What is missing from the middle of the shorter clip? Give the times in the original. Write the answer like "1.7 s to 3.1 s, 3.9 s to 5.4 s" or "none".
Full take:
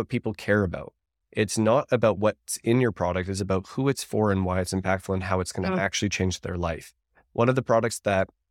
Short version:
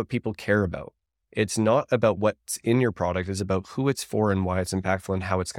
none